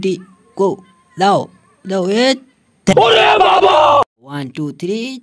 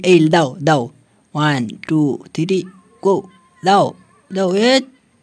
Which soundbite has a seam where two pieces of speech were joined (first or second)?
first